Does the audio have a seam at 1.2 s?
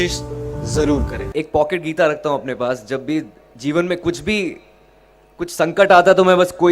yes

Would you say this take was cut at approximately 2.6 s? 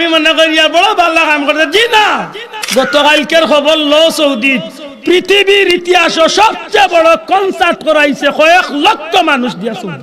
yes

